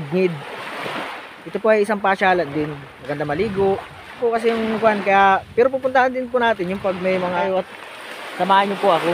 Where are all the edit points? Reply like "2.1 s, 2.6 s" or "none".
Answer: 4.2 s, 7.4 s